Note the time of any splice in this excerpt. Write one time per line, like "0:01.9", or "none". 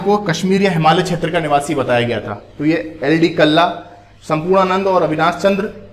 none